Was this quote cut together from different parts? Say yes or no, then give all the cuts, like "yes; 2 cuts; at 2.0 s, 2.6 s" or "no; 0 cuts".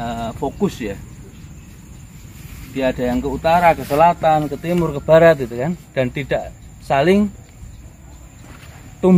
no; 0 cuts